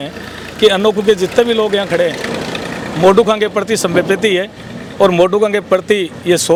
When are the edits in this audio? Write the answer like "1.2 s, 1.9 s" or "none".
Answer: none